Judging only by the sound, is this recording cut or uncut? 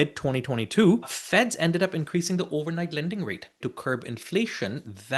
cut